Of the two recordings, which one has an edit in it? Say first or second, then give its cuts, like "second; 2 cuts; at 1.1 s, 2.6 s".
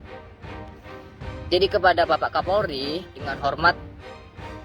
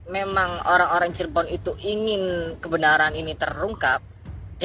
first; 1 cut; at 1.1 s